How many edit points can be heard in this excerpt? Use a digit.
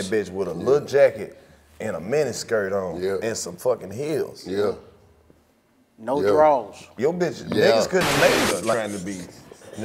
1